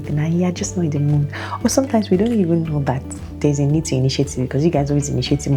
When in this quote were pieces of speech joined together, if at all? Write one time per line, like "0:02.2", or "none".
none